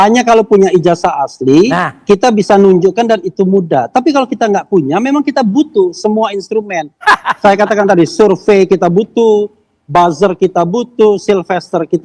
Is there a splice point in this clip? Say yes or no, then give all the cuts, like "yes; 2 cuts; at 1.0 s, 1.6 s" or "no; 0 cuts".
no; 0 cuts